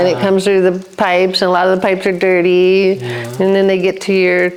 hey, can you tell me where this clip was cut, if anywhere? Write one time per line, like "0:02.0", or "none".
none